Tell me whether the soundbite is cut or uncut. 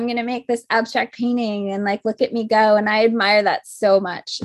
uncut